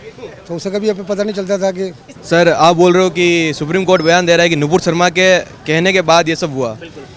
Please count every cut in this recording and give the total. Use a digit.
1